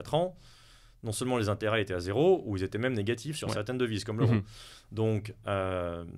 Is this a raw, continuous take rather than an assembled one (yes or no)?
yes